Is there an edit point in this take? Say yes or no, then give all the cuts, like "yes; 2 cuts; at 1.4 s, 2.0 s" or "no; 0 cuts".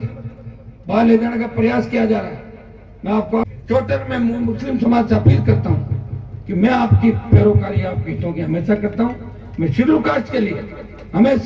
yes; 1 cut; at 3.5 s